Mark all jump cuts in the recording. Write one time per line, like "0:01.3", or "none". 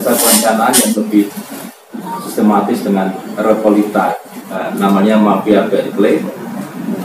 0:04.7